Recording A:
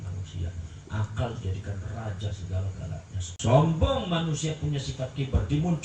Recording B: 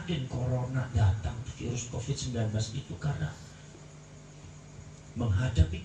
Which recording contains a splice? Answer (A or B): A